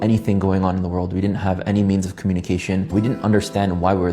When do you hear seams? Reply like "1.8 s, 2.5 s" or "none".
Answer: 2.9 s